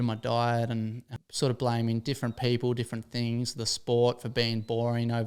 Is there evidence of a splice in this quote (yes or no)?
yes